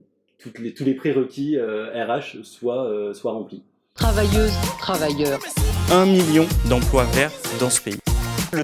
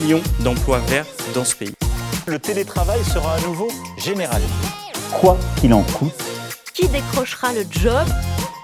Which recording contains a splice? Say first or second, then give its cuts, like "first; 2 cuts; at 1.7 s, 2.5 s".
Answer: first; 1 cut; at 4.0 s